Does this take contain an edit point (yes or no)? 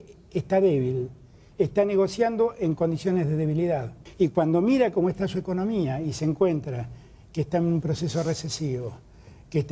yes